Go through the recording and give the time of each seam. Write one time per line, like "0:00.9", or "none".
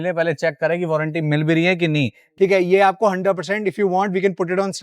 0:02.2